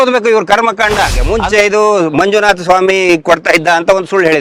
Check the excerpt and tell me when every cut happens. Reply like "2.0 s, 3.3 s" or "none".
1.2 s